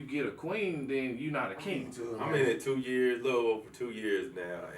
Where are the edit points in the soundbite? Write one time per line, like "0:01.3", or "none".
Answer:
0:02.3